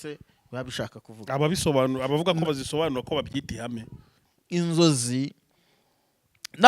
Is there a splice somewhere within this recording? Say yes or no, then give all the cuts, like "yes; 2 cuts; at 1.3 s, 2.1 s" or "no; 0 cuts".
yes; 1 cut; at 4.3 s